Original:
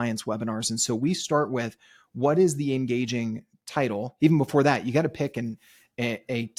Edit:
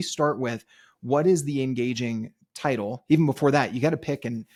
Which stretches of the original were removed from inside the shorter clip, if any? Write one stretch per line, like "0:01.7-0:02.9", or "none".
none